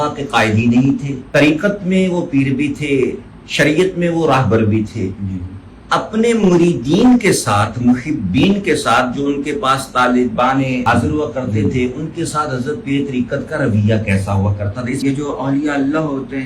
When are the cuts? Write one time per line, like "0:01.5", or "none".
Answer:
0:01.1
0:10.8
0:15.0